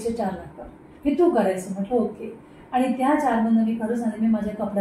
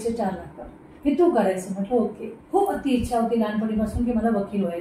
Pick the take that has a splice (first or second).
second